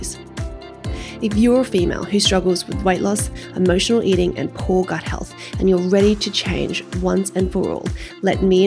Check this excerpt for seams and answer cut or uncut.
uncut